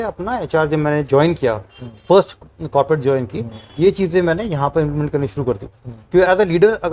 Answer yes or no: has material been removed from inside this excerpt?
no